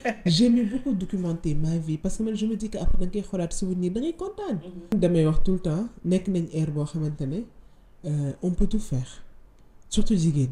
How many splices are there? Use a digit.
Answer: 1